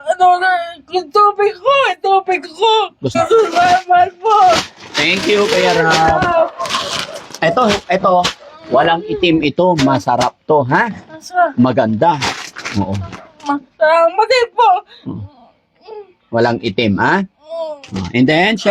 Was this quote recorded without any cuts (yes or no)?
no